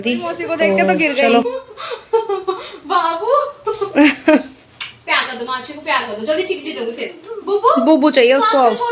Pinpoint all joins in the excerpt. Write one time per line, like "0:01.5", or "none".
0:01.4